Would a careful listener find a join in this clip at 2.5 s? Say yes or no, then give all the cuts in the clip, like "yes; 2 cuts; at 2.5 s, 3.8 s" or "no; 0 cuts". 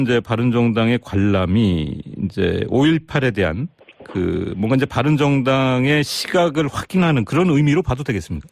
no; 0 cuts